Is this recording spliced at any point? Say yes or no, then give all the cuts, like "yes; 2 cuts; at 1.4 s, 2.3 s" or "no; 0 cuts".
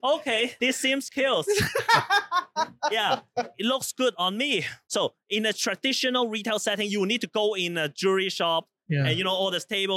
no; 0 cuts